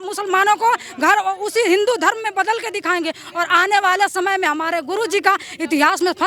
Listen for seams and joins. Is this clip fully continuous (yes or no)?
yes